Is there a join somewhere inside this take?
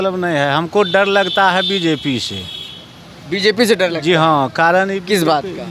no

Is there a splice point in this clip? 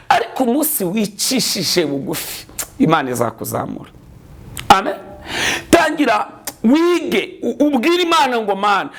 no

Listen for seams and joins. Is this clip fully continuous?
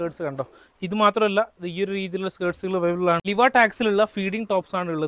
no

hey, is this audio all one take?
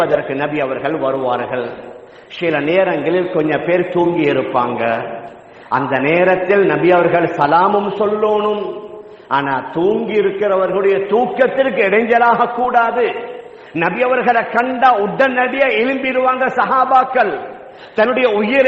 yes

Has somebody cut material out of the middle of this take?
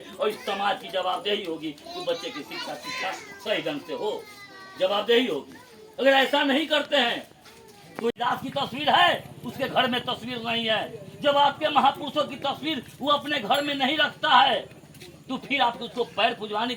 no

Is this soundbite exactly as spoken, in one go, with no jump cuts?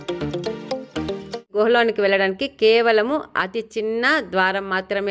no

